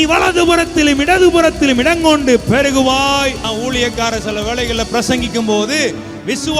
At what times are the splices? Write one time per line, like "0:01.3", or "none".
0:03.4